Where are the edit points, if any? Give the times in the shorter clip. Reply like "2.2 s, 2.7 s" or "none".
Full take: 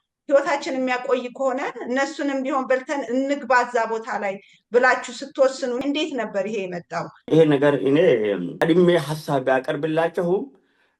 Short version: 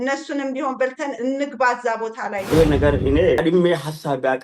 2.4 s, 3.4 s